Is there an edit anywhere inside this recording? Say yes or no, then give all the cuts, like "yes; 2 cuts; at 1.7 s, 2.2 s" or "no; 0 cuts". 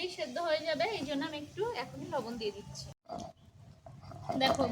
yes; 1 cut; at 3.0 s